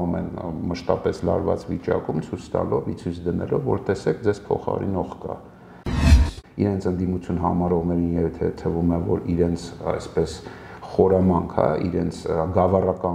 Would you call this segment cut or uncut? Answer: cut